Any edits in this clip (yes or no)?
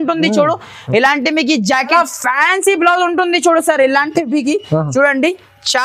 yes